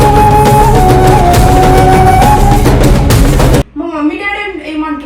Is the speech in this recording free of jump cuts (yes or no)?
no